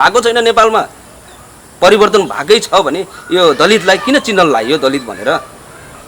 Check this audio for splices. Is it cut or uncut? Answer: uncut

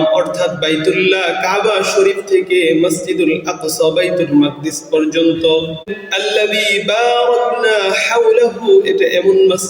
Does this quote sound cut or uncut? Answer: cut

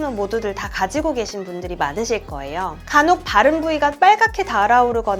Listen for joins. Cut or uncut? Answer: cut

